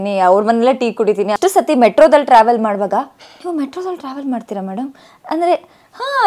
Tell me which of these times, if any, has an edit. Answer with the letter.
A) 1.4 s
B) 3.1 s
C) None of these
A